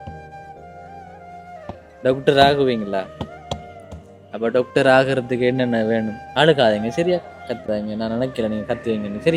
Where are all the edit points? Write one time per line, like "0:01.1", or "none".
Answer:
0:01.7